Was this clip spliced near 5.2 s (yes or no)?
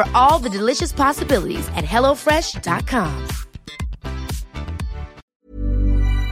yes